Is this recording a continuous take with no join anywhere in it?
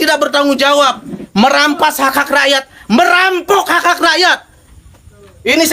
yes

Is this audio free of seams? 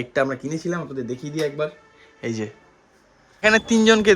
no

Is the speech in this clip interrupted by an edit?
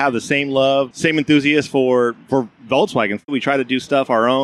yes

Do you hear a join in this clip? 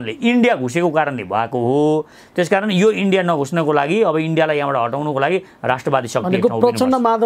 no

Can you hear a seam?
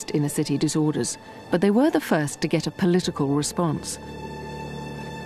no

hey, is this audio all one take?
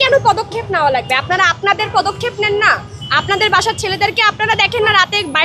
yes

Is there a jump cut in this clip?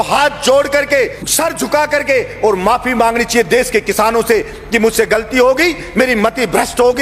yes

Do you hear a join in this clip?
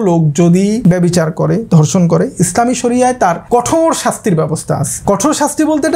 yes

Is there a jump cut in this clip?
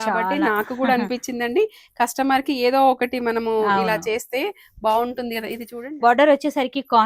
yes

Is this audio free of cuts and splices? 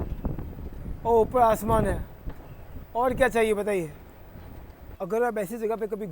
no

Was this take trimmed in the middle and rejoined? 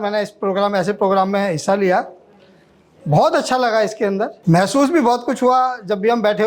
yes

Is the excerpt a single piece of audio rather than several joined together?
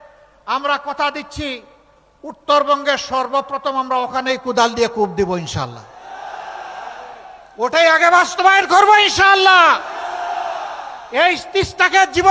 yes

